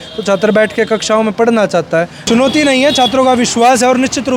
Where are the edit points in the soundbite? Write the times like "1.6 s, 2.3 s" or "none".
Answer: 2.2 s